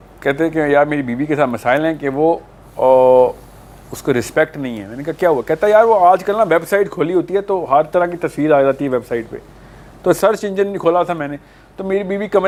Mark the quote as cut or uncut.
uncut